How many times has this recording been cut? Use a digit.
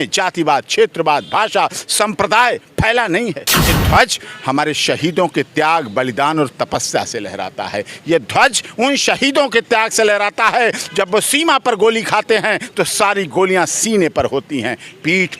1